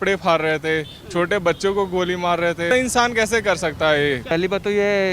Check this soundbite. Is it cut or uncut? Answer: cut